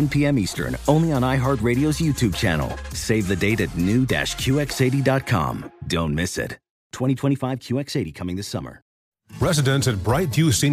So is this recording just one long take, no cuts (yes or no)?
no